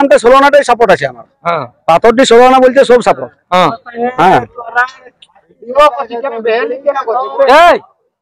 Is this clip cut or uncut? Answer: uncut